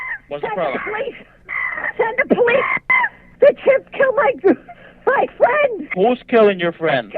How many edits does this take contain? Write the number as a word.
two